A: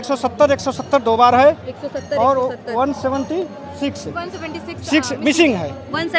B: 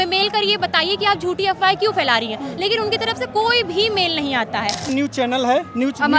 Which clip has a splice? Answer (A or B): B